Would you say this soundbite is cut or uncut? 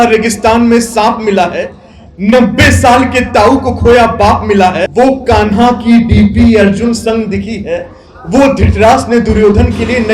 cut